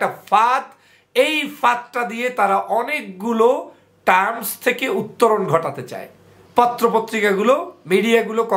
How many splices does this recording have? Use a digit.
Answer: 1